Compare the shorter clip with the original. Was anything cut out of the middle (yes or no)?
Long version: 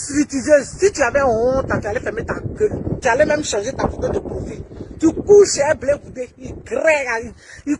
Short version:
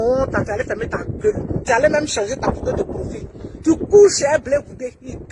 no